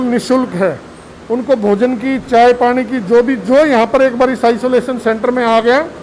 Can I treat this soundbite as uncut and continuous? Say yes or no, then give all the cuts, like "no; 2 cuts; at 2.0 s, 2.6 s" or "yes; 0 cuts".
yes; 0 cuts